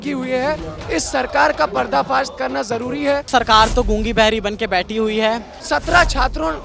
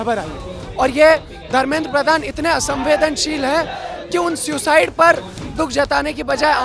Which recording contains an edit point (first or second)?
first